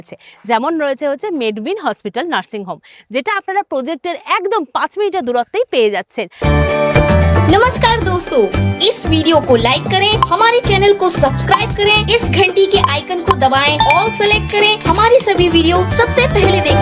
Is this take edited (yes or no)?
yes